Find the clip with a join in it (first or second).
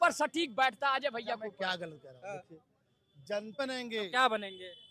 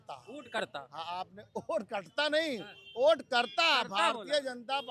first